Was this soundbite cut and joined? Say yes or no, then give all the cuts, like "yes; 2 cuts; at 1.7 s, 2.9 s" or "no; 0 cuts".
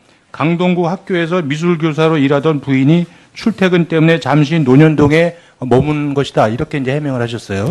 no; 0 cuts